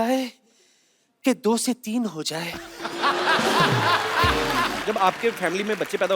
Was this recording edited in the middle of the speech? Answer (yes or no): yes